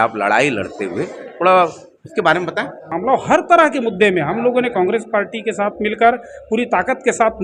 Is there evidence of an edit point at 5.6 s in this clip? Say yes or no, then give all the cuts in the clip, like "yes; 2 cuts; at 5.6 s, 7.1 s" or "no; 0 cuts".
no; 1 cut; at 2.9 s